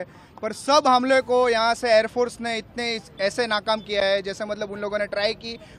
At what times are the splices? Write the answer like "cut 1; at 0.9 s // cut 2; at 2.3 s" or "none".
none